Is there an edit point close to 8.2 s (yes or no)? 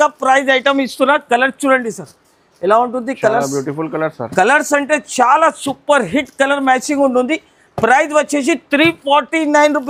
no